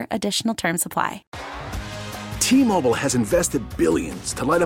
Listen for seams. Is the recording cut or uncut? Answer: cut